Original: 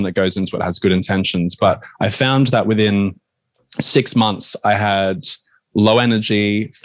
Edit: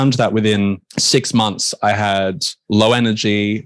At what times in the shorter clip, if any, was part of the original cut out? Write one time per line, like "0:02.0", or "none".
0:00.9
0:02.5